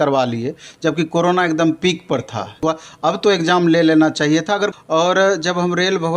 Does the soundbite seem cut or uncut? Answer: cut